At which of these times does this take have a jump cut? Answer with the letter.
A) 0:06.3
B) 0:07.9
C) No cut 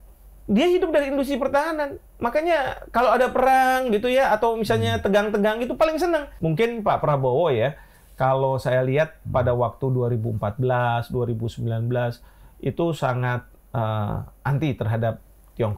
A